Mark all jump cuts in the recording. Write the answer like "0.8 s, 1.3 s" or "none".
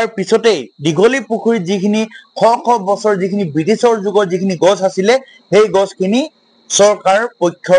none